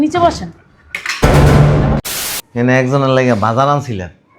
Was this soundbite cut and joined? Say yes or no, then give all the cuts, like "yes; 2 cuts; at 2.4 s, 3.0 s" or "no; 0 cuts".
yes; 1 cut; at 2.0 s